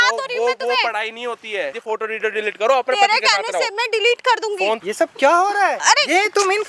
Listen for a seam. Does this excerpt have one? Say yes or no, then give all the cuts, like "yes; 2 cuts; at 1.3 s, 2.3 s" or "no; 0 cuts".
yes; 3 cuts; at 1.8 s, 4.8 s, 5.8 s